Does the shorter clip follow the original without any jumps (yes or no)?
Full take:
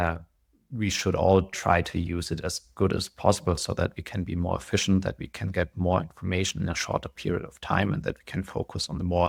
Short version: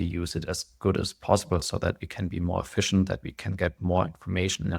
yes